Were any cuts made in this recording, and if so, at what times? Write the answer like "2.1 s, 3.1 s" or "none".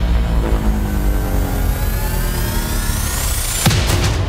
none